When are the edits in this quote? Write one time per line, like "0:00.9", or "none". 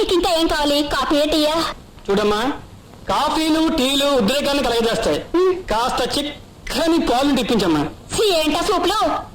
none

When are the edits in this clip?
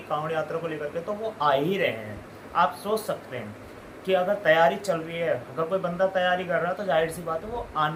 none

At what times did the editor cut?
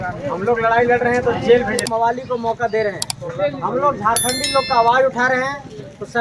0:01.9

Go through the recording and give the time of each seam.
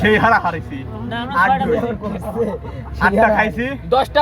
none

